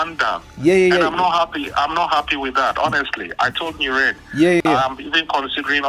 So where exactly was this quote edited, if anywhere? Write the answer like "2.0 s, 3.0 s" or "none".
none